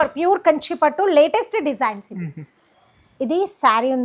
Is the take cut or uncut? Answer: uncut